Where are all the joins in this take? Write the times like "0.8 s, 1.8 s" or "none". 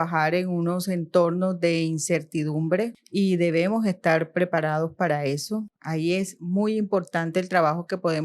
3.0 s, 5.8 s